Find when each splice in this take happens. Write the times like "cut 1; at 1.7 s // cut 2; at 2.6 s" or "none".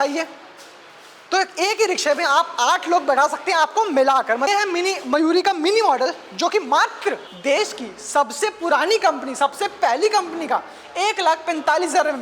cut 1; at 4.5 s // cut 2; at 7.3 s